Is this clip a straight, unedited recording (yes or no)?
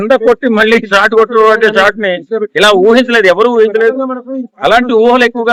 yes